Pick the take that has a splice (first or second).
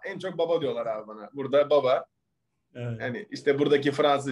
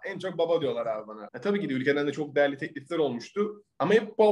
second